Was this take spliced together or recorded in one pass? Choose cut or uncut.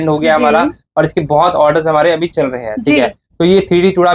uncut